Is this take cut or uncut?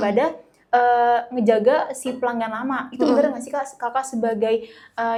uncut